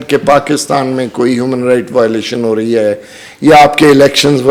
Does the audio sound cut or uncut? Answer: uncut